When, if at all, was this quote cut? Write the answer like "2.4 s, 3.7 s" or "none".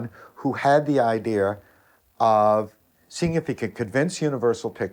none